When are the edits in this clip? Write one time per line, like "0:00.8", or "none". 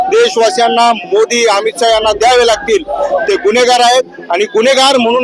none